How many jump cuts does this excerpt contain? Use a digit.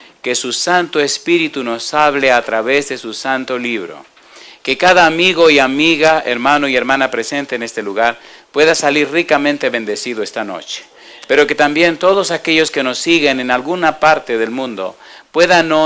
1